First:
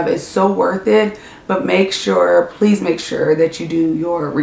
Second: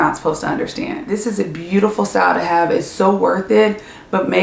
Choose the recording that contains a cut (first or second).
second